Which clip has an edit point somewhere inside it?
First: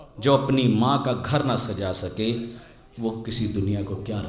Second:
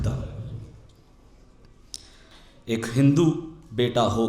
second; 1 cut; at 2.4 s

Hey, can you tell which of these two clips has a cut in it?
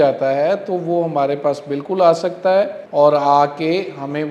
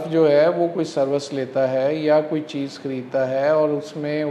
first; 1 cut; at 2.8 s

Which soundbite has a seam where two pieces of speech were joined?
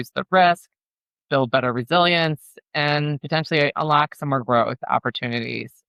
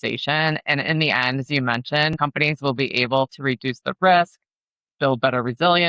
second; 1 cut; at 2.1 s

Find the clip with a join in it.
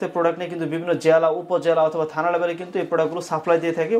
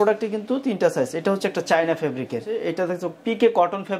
second; 1 cut; at 2.6 s

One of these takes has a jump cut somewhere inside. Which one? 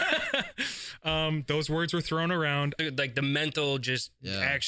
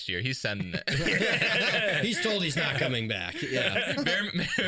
first; 1 cut; at 2.8 s

